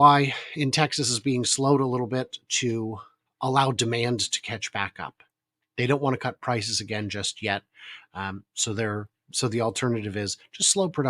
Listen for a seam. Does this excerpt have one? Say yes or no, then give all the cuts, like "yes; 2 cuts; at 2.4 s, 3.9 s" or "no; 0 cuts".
no; 0 cuts